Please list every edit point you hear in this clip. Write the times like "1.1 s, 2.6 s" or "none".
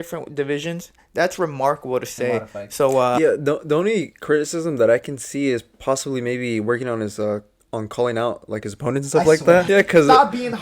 3.2 s, 9.7 s